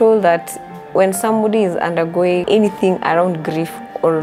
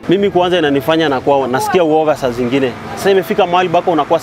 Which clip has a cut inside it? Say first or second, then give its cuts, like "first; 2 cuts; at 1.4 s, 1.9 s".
first; 1 cut; at 2.4 s